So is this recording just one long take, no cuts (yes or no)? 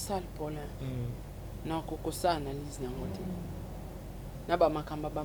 yes